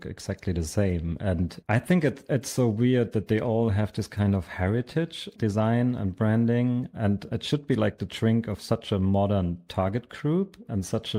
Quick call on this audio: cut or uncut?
cut